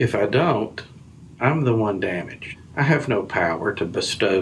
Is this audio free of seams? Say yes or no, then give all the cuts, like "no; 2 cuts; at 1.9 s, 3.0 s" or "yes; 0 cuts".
no; 1 cut; at 2.5 s